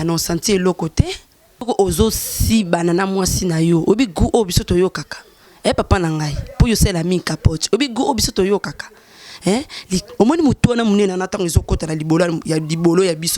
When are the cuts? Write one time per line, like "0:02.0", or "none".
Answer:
0:01.6
0:10.1